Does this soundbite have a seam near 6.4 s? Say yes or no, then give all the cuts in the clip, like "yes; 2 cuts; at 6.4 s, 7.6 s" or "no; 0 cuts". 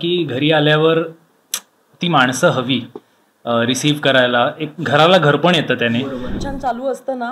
yes; 1 cut; at 6.4 s